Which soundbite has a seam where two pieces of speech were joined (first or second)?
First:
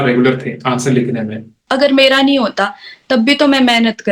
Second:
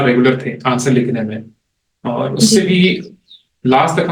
first